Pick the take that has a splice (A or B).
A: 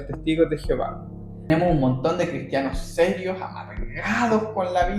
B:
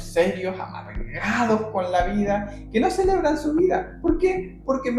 A